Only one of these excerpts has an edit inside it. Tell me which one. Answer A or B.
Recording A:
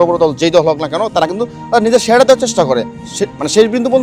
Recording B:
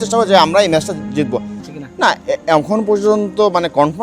B